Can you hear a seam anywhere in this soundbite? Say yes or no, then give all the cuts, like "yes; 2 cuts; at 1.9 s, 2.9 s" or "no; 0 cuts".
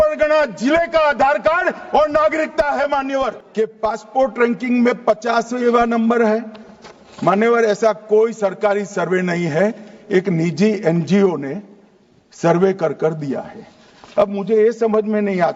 yes; 1 cut; at 3.4 s